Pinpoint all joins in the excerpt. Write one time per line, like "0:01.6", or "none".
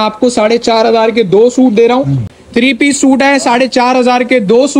0:02.2